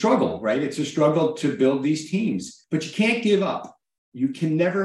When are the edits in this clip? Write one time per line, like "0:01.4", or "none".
0:02.5